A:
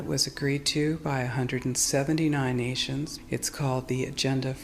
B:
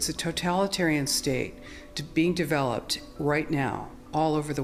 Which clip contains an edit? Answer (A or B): A